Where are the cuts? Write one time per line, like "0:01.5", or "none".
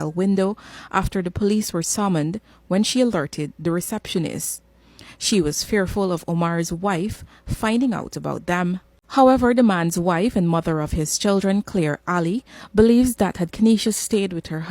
0:08.9